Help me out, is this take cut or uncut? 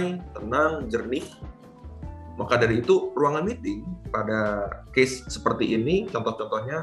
uncut